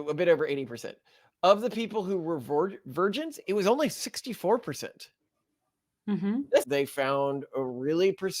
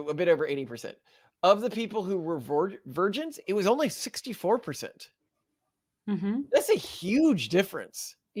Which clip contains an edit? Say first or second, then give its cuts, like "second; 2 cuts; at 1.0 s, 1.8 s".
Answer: first; 1 cut; at 6.6 s